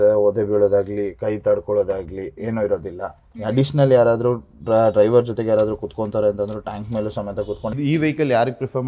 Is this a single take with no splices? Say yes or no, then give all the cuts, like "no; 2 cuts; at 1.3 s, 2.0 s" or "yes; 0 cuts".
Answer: no; 1 cut; at 7.7 s